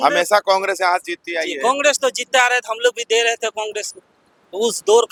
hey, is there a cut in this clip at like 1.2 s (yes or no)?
no